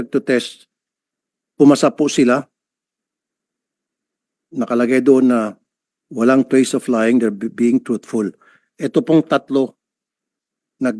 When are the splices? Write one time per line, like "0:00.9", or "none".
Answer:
none